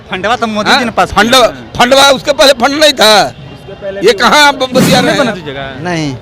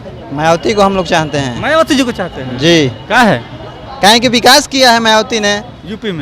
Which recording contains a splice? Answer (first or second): first